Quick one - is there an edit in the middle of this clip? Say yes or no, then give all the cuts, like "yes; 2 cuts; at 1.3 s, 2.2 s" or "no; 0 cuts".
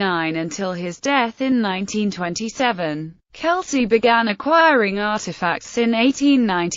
no; 0 cuts